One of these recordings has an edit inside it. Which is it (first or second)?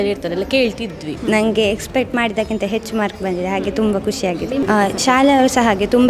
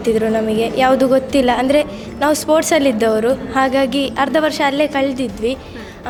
first